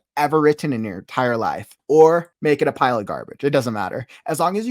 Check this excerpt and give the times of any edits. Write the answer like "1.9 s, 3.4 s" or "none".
1.7 s, 2.3 s